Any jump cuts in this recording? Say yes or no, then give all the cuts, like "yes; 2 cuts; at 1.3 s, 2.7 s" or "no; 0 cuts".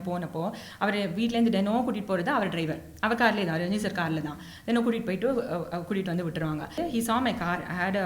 yes; 1 cut; at 6.8 s